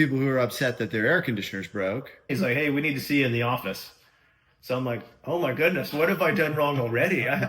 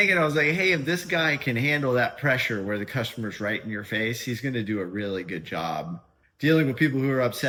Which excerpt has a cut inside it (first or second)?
first